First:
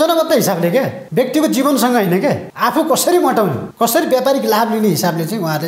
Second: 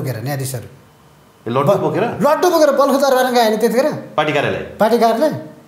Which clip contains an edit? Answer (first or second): first